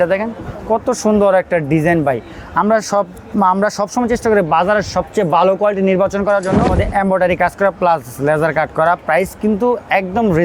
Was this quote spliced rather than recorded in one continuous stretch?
yes; 1 cut; at 6.8 s

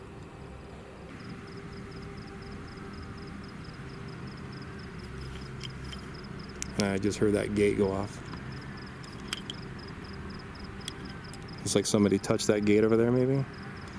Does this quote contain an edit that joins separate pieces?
yes; 1 cut; at 1.1 s

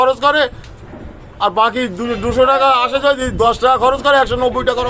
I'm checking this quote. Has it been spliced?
no; 0 cuts

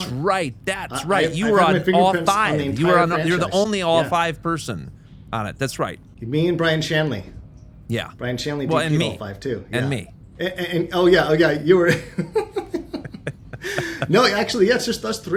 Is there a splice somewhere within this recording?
no; 0 cuts

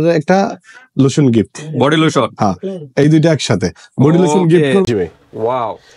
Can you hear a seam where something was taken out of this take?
yes; 1 cut; at 4.9 s

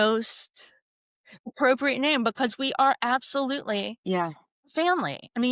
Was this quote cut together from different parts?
no; 0 cuts

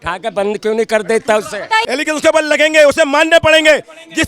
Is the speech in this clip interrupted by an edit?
yes; 1 cut; at 1.8 s

